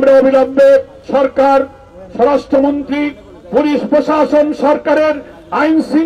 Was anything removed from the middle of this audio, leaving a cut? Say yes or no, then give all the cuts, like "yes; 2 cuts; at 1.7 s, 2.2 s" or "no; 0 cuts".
yes; 1 cut; at 1.0 s